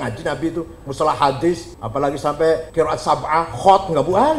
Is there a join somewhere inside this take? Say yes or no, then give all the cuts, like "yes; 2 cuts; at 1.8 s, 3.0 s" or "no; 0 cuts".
yes; 2 cuts; at 1.8 s, 2.7 s